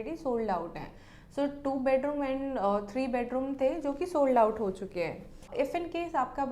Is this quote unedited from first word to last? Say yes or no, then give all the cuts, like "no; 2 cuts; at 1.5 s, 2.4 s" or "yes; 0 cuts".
no; 1 cut; at 5.5 s